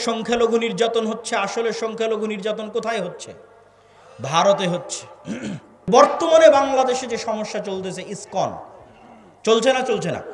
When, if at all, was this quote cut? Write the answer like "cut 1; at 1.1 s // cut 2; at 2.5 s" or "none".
cut 1; at 5.7 s